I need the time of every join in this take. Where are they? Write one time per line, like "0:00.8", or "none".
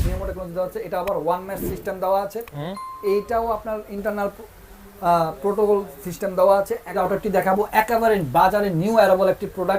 0:07.0